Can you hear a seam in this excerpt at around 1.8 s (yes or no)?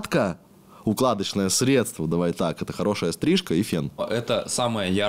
no